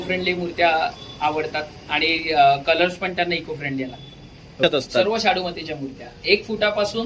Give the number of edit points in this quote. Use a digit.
1